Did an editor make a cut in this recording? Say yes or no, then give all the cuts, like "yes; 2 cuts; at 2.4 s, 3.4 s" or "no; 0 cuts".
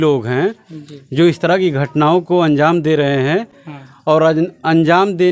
no; 0 cuts